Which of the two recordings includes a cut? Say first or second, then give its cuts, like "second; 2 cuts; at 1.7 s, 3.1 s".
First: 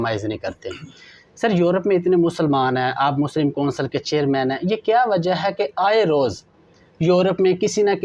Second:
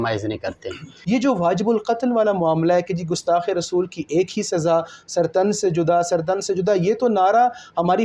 second; 1 cut; at 0.9 s